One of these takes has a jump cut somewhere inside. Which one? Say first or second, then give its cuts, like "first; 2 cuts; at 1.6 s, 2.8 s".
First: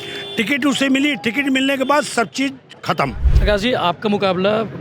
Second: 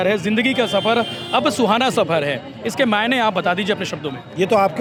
first; 1 cut; at 3.3 s